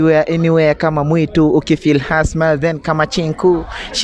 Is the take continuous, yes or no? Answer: yes